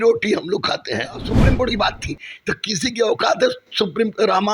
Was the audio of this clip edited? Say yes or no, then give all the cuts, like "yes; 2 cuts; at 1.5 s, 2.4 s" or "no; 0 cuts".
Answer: yes; 1 cut; at 1.3 s